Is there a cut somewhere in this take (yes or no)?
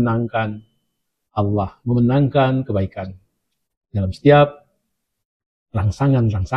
no